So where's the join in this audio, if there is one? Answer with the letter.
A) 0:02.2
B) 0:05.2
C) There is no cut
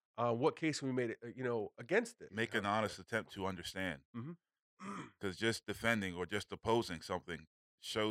A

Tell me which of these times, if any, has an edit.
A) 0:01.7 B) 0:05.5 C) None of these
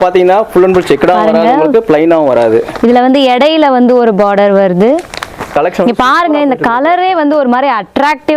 B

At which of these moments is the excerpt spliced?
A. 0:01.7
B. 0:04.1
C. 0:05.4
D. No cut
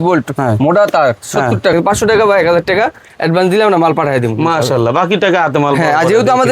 A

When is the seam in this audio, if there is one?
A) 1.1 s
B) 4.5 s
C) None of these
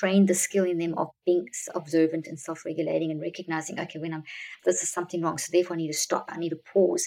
B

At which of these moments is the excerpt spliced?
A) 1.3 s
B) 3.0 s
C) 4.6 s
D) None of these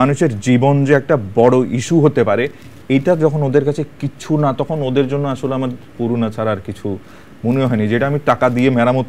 D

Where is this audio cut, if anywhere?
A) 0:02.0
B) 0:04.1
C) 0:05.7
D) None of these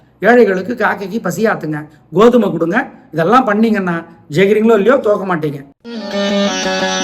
C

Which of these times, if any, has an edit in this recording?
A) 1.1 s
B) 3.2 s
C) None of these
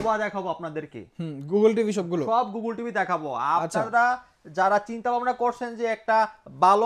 C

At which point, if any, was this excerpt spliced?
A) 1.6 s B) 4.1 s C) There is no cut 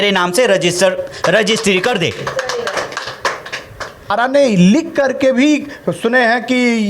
B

